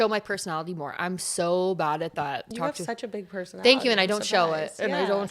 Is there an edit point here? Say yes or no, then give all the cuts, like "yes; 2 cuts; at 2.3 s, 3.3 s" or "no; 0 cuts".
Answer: yes; 1 cut; at 2.5 s